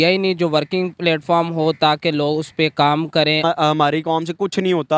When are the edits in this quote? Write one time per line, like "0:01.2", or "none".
0:03.4